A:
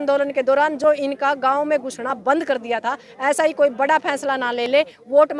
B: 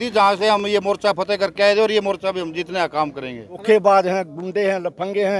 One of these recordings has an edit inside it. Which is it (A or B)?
B